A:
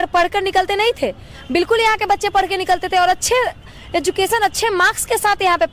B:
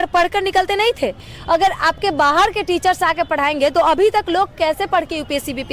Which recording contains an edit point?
B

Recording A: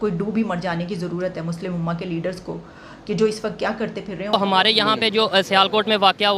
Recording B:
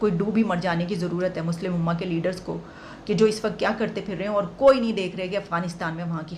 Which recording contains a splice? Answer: A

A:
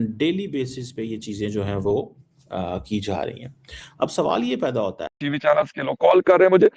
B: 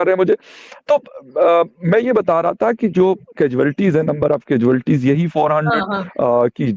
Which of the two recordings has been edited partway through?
A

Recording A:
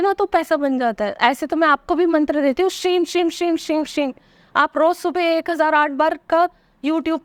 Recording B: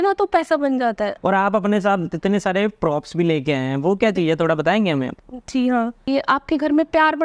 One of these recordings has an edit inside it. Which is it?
B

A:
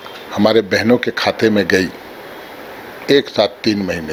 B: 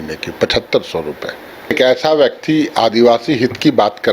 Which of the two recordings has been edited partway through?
B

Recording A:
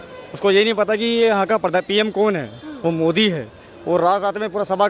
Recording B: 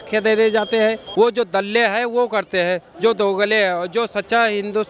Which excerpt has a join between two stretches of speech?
B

